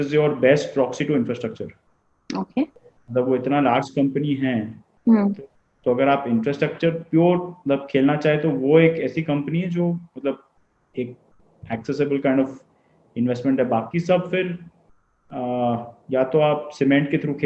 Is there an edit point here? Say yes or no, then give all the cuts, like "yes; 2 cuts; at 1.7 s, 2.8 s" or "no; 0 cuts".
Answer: no; 0 cuts